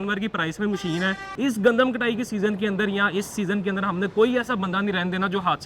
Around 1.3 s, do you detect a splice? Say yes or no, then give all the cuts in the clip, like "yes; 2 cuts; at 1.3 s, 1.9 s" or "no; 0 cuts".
yes; 1 cut; at 1.3 s